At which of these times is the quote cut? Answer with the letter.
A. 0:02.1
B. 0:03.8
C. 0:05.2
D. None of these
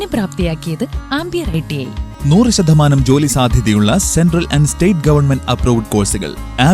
A